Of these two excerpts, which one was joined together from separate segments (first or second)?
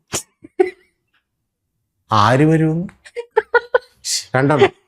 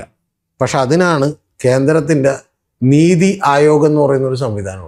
first